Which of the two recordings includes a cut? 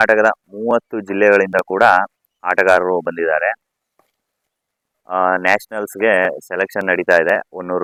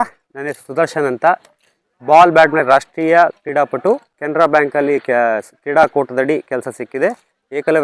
second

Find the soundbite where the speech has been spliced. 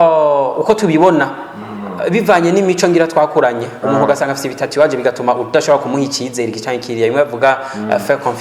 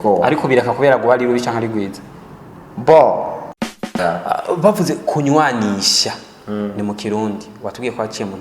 second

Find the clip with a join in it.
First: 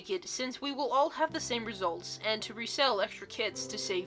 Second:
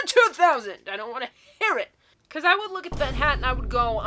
second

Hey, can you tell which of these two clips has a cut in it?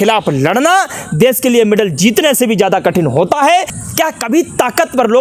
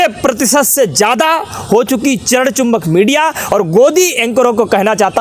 first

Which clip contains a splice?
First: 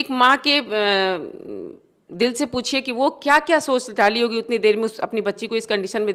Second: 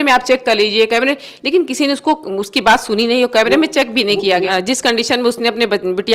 second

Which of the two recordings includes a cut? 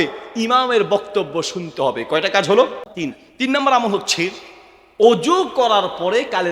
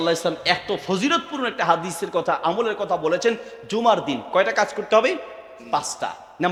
first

